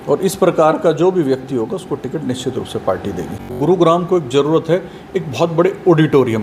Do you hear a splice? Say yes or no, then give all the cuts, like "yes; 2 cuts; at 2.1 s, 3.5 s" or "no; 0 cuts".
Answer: yes; 1 cut; at 3.6 s